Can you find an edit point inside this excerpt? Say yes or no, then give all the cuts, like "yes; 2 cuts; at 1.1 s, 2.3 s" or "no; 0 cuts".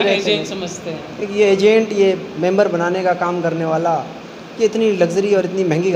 no; 0 cuts